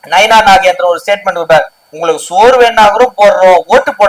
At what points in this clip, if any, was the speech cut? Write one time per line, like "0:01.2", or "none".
0:01.8